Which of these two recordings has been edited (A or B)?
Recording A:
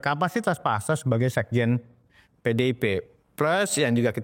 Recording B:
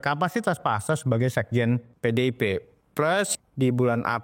B